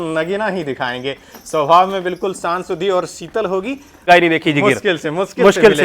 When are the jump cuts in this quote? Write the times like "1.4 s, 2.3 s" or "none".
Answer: 4.1 s